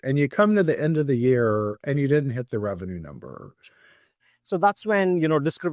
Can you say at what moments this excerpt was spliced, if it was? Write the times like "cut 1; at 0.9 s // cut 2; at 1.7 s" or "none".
cut 1; at 4.2 s